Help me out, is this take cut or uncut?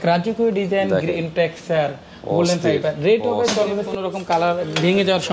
cut